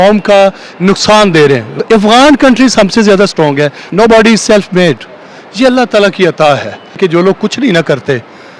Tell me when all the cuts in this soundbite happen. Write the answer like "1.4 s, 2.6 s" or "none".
1.8 s, 3.8 s, 7.0 s